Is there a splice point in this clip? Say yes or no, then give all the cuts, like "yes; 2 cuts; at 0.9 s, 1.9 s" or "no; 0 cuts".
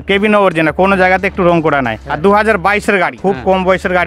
yes; 2 cuts; at 2.0 s, 3.2 s